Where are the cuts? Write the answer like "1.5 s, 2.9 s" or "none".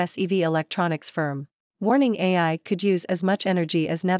1.6 s